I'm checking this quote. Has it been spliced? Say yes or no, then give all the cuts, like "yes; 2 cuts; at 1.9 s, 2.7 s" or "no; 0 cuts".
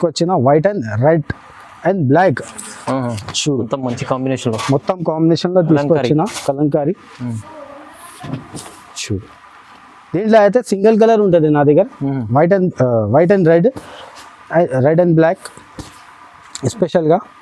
no; 0 cuts